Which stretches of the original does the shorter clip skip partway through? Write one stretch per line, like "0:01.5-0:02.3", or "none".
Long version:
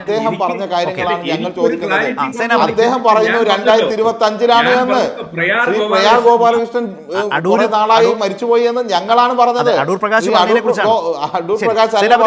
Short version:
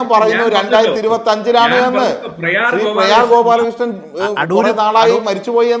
none